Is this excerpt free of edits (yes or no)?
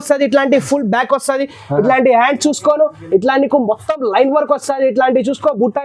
yes